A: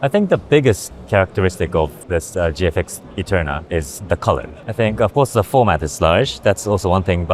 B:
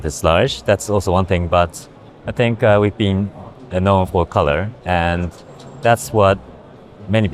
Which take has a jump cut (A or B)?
A